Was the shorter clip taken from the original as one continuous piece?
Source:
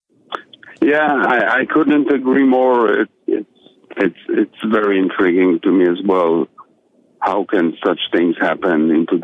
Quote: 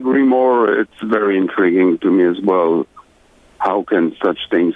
no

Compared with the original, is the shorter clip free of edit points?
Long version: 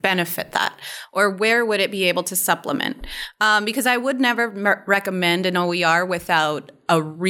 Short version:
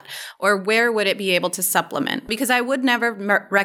no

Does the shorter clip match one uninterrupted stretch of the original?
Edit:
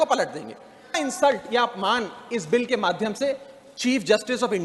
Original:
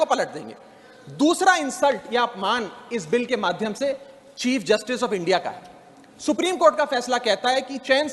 no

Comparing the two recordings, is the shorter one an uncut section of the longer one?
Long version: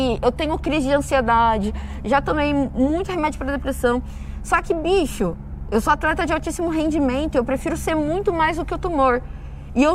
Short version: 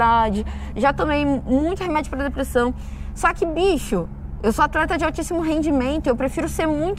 yes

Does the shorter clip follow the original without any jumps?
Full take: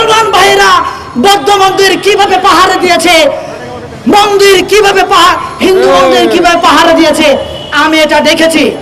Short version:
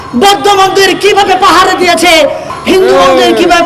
no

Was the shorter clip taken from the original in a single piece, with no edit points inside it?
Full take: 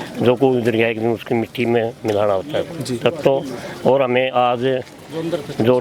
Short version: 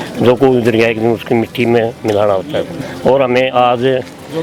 no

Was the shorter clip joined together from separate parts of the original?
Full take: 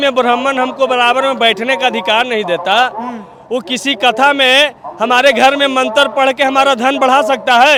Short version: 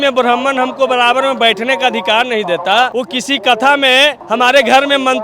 yes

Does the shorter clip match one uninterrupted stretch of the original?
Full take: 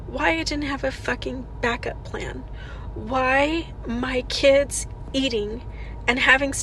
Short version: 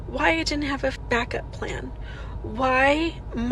no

